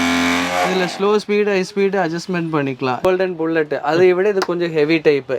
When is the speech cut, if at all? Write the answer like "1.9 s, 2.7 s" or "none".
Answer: 3.0 s